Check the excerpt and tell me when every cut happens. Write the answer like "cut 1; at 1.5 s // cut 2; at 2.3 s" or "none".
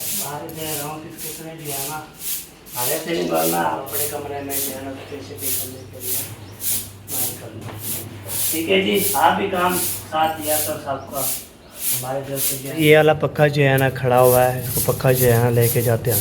cut 1; at 3.8 s // cut 2; at 8.0 s // cut 3; at 12.8 s